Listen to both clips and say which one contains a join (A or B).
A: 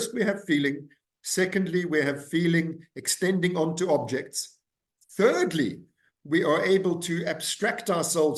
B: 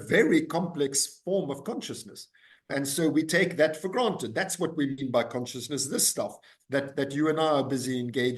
B